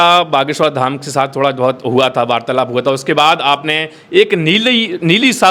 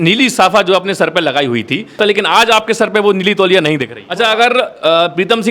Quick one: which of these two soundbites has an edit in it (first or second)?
second